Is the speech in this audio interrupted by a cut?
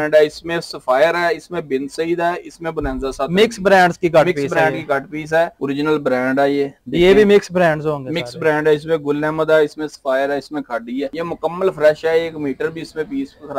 yes; 2 cuts; at 5.6 s, 11.1 s

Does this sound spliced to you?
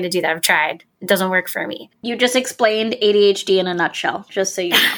yes; 1 cut; at 1.9 s

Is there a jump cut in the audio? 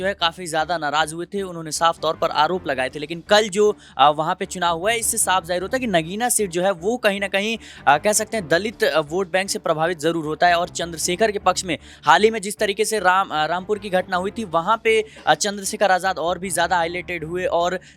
no; 0 cuts

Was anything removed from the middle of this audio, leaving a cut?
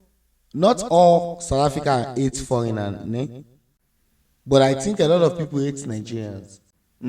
no; 0 cuts

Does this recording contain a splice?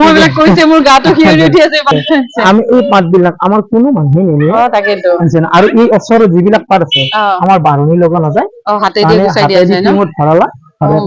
yes; 1 cut; at 1.9 s

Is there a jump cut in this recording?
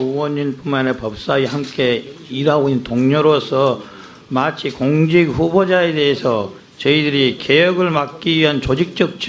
yes; 1 cut; at 2.2 s

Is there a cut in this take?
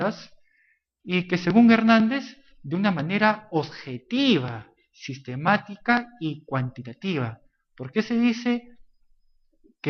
no; 0 cuts

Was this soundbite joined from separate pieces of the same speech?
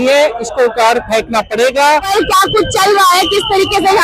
yes; 1 cut; at 2.1 s

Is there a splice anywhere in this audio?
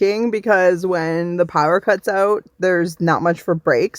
no; 0 cuts

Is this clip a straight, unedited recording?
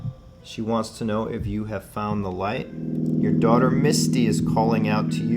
no; 1 cut; at 3.0 s

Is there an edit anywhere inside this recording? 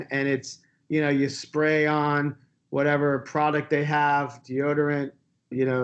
no; 0 cuts

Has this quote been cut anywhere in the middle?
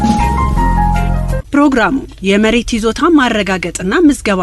yes; 1 cut; at 1.2 s

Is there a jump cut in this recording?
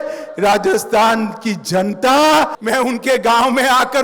yes; 1 cut; at 2.6 s

